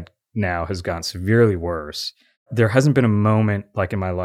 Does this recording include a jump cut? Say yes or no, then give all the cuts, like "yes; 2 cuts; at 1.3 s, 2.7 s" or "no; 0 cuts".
yes; 1 cut; at 2.5 s